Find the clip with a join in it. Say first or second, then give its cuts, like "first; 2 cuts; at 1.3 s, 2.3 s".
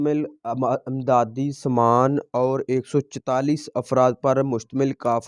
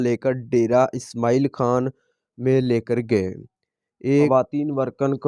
second; 1 cut; at 4.3 s